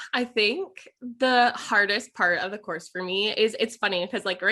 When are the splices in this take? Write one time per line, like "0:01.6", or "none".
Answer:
none